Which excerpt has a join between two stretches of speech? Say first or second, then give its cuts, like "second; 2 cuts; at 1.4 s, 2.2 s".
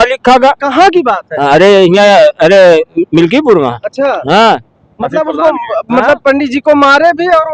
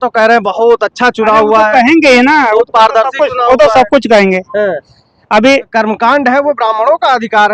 second; 1 cut; at 5.7 s